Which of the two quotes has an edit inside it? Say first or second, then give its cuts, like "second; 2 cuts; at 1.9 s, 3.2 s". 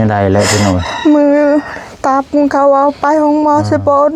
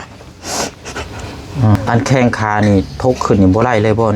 second; 1 cut; at 1.8 s